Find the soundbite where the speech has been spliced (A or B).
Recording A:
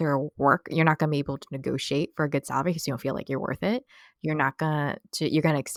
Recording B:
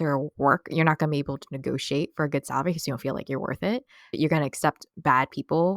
B